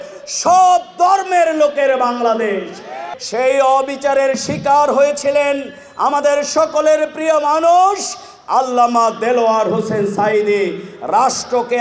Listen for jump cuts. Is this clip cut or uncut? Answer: cut